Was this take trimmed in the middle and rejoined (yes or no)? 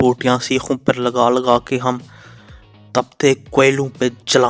no